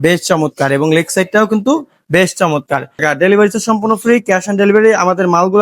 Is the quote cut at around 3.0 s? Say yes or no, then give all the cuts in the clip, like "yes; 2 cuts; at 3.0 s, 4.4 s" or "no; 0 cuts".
yes; 1 cut; at 3.0 s